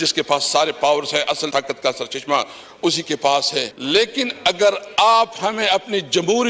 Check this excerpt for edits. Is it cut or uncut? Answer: cut